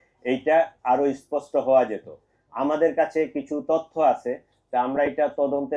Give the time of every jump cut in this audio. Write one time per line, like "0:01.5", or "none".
none